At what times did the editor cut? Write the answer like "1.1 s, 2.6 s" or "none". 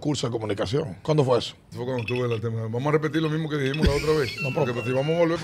0.9 s, 1.6 s

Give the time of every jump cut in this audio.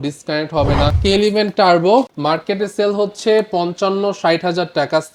1.0 s, 2.1 s

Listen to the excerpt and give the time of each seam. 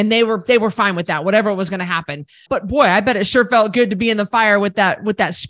2.4 s

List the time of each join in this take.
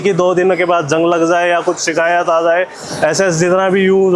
2.8 s

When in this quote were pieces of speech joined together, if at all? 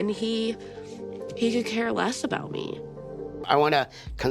3.4 s

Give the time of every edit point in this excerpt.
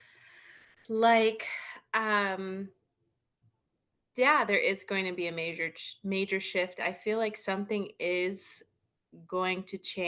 none

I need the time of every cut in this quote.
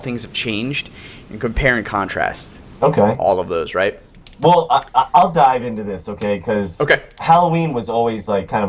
none

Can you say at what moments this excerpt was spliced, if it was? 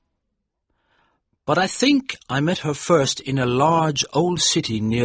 2.6 s

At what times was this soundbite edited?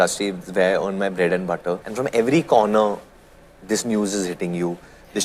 1.8 s

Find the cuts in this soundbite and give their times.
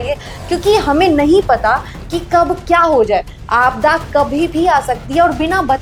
none

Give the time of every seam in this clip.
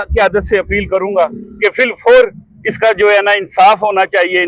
none

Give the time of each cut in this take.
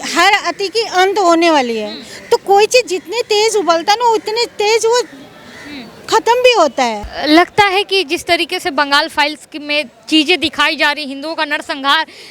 7.1 s

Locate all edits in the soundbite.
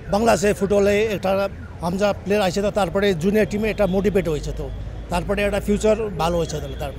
none

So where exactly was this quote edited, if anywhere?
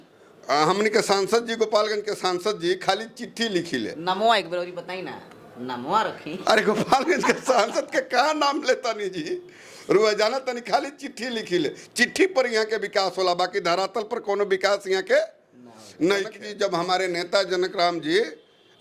16.4 s

